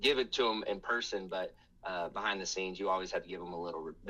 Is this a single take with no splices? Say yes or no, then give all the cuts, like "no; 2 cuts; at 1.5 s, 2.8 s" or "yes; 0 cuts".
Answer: yes; 0 cuts